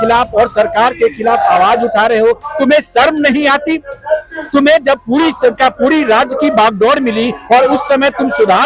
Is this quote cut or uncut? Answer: uncut